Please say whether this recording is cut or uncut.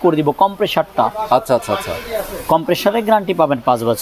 uncut